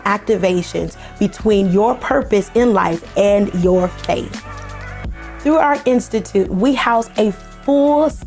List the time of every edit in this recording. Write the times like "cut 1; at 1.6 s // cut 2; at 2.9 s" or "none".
none